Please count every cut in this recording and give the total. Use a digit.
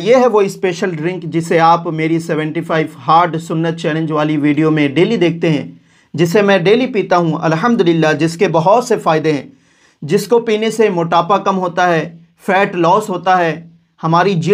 0